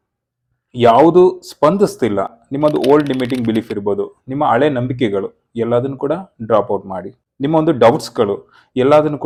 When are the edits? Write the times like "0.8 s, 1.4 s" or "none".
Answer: none